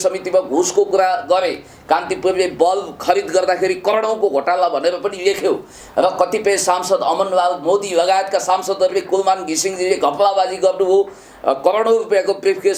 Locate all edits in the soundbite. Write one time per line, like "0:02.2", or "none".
none